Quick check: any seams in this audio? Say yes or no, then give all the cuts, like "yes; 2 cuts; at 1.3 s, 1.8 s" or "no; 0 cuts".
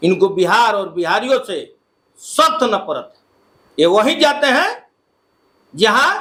no; 0 cuts